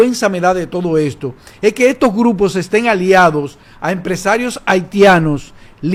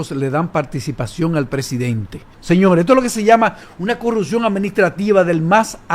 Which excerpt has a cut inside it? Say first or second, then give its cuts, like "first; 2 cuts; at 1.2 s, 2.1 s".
second; 1 cut; at 2.3 s